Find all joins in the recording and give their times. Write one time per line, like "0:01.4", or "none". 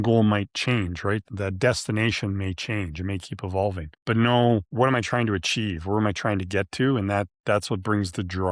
0:01.2